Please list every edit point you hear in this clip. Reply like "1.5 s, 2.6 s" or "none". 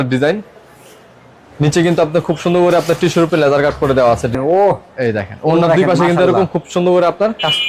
4.3 s